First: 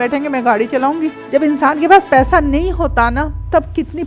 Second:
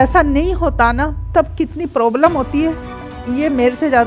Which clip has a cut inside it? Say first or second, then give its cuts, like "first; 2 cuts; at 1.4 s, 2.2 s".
first; 1 cut; at 1.2 s